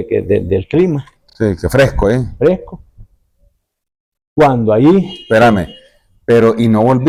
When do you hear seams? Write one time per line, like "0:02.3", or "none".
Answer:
none